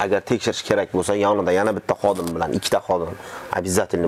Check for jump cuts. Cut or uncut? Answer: uncut